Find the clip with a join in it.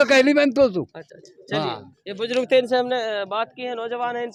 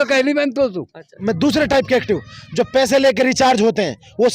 second; 1 cut; at 1.1 s

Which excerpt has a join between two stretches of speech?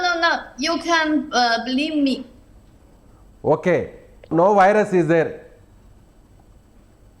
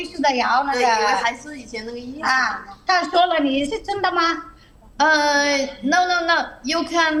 first; 1 cut; at 4.3 s

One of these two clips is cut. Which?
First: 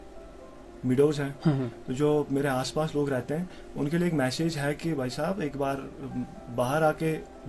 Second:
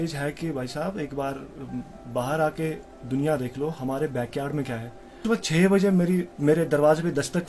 second; 1 cut; at 5.2 s

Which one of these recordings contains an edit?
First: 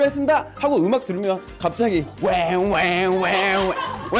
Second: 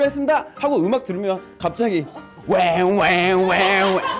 first; 1 cut; at 2.1 s

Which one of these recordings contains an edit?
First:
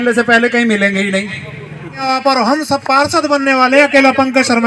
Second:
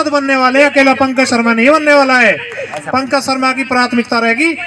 first; 1 cut; at 2.0 s

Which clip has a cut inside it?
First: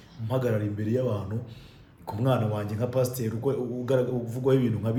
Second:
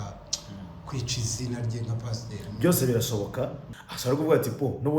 second; 1 cut; at 3.6 s

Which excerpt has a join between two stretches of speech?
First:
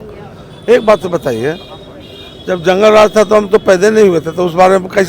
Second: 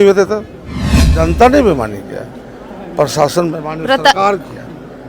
second; 1 cut; at 1.0 s

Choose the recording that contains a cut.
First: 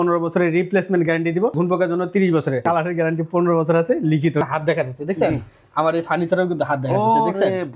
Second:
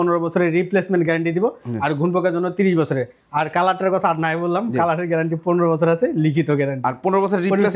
first; 3 cuts; at 1.5 s, 2.6 s, 4.4 s

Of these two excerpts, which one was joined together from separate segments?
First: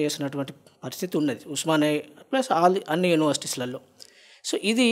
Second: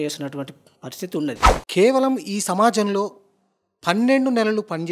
second; 1 cut; at 1.4 s

